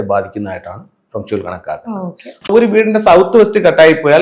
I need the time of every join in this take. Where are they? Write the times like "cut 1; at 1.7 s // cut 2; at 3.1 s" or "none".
cut 1; at 2.5 s